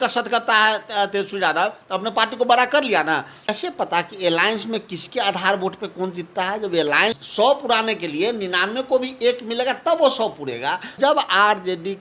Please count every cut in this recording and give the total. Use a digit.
3